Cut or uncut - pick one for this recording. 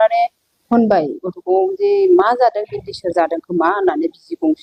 uncut